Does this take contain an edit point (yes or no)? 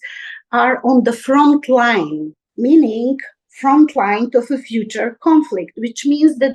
no